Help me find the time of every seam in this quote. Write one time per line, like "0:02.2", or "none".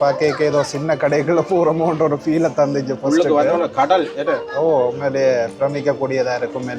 none